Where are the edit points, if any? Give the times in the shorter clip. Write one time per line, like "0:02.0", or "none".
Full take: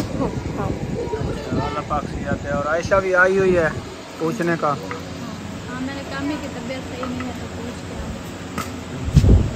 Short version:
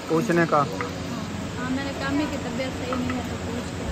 none